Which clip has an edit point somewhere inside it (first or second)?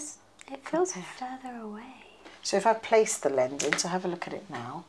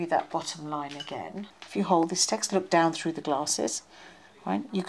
second